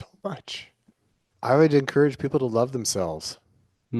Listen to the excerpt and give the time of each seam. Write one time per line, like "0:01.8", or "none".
0:01.3